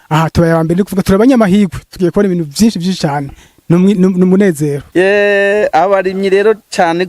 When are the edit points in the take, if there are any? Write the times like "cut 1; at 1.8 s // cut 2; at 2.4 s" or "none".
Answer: cut 1; at 4.8 s